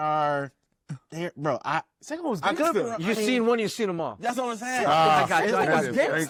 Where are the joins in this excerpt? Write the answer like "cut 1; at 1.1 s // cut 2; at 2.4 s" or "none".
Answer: none